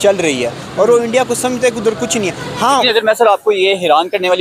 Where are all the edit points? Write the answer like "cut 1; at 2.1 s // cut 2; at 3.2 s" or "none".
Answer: cut 1; at 2.8 s

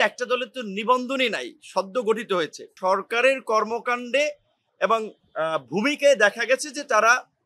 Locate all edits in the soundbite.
cut 1; at 2.6 s

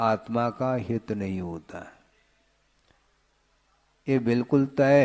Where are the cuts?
none

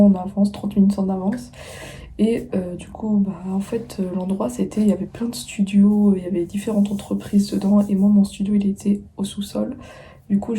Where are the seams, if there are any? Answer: none

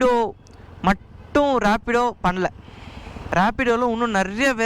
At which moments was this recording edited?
cut 1; at 3.2 s

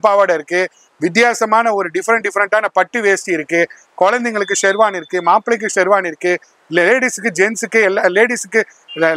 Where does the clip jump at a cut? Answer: none

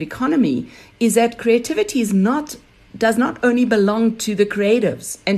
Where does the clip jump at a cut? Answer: none

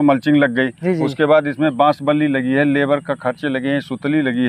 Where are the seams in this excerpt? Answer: none

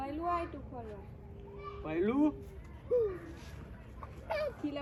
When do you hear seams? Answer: none

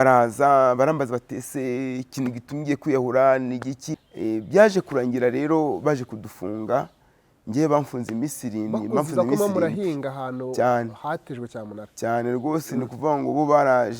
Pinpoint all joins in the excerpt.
cut 1; at 3.8 s

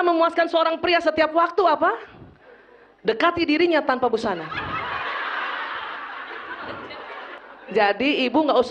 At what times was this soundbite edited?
cut 1; at 7.4 s

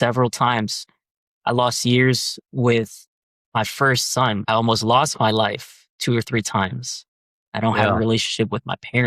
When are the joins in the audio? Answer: cut 1; at 4.4 s

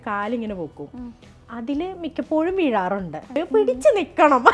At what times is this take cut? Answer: cut 1; at 3.4 s

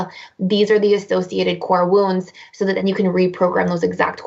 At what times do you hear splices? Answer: none

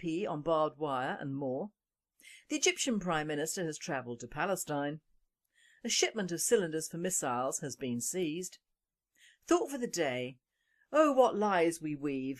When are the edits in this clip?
cut 1; at 6.7 s

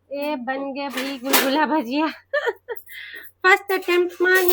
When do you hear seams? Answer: none

